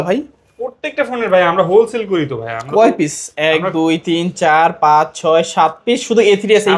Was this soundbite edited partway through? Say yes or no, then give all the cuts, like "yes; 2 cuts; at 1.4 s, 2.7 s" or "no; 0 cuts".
no; 0 cuts